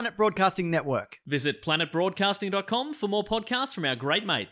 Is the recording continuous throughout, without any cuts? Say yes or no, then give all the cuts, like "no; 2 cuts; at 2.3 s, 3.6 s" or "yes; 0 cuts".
yes; 0 cuts